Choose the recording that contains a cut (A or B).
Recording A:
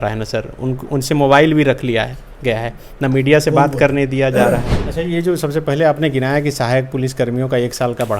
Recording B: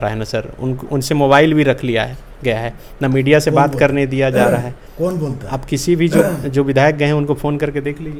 A